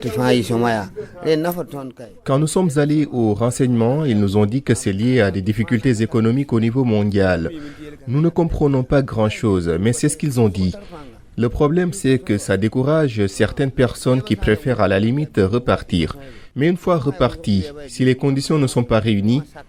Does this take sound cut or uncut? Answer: uncut